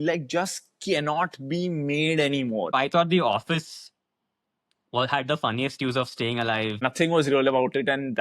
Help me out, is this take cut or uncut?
cut